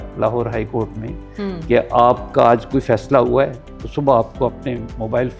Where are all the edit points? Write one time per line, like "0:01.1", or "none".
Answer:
none